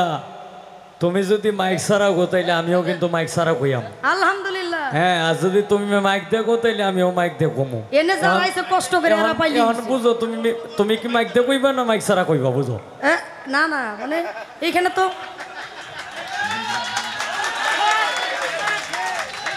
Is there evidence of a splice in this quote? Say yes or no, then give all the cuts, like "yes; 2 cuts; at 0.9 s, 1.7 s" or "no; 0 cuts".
no; 0 cuts